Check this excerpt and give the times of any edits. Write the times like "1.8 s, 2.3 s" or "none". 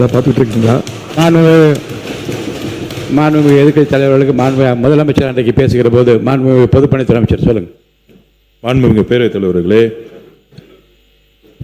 none